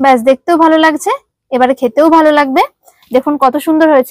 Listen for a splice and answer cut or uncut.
uncut